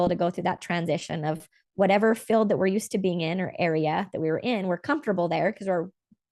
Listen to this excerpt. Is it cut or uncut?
uncut